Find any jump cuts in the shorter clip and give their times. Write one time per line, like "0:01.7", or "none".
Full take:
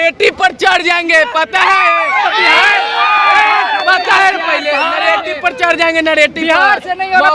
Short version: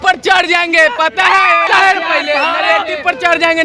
0:01.7